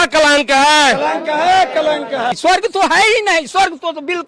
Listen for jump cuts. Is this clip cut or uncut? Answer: cut